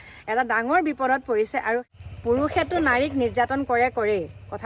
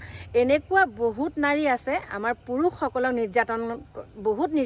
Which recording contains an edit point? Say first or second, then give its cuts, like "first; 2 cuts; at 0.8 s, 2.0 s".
first; 1 cut; at 1.9 s